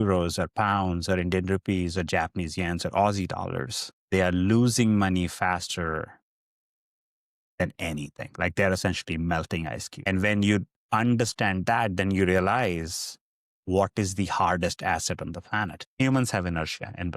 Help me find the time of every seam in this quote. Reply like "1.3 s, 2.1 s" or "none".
9.9 s, 15.8 s